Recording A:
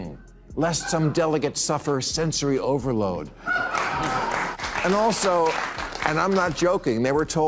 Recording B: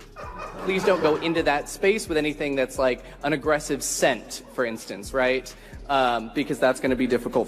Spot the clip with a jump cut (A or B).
A